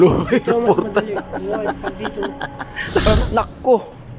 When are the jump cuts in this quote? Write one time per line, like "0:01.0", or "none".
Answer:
0:03.0